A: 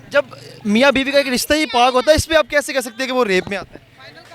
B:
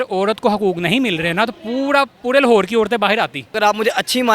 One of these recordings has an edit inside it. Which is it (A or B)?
B